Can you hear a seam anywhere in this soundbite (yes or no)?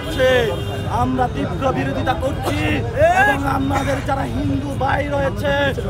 no